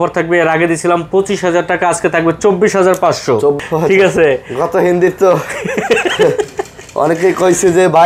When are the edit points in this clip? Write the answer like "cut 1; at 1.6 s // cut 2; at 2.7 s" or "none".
cut 1; at 3.6 s